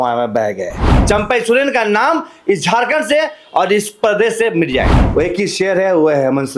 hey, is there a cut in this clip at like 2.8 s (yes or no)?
no